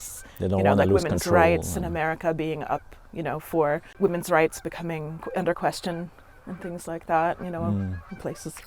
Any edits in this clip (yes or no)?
no